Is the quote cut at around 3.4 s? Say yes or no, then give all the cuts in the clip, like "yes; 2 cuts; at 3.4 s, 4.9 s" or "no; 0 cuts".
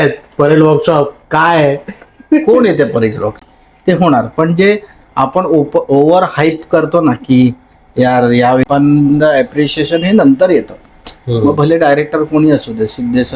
yes; 2 cuts; at 3.4 s, 8.6 s